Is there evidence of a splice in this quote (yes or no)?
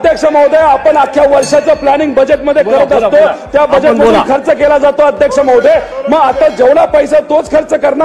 no